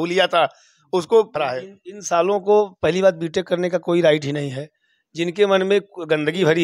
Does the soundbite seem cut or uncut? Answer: cut